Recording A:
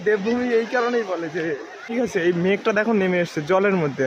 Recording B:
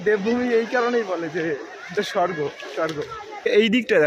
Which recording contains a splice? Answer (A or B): A